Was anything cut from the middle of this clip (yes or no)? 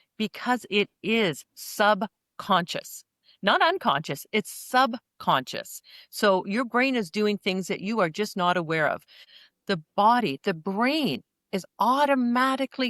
yes